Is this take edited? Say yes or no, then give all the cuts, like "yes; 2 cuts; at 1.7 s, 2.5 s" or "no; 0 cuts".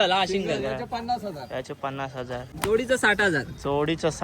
yes; 1 cut; at 2.5 s